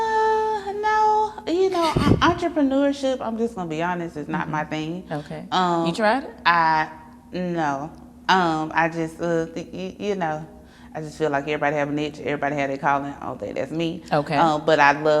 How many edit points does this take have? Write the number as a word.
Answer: zero